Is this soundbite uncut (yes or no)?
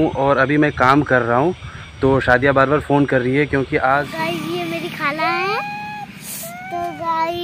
no